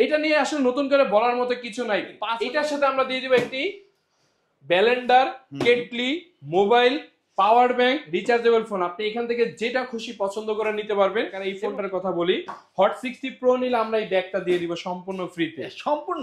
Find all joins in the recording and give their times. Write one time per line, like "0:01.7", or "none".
0:02.3
0:11.5

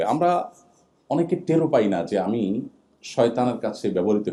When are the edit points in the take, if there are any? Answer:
none

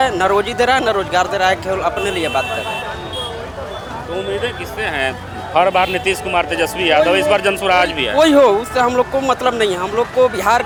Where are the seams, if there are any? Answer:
none

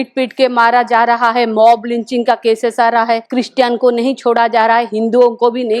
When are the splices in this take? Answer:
0:03.3

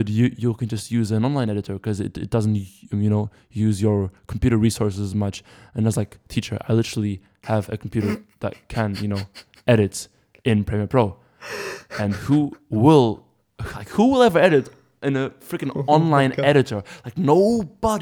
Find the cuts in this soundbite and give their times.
none

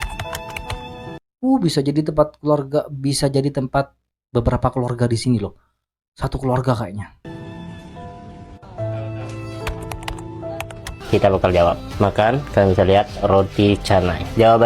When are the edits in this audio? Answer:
0:11.0

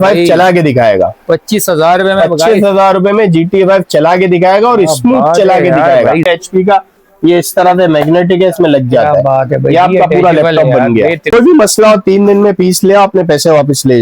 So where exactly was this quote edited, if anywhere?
0:06.2
0:11.3

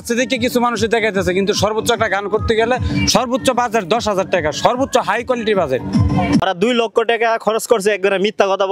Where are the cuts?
0:06.4

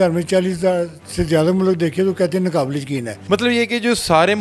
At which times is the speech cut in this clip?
0:03.1

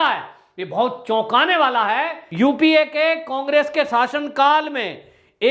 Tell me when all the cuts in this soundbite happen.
0:02.2

